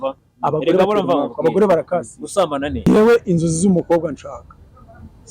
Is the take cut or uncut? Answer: cut